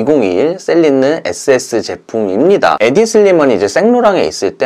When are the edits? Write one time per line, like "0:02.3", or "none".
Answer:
0:02.8